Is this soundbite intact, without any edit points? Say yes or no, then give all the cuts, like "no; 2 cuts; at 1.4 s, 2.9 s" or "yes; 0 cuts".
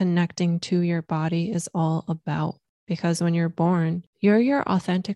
no; 2 cuts; at 2.7 s, 4.1 s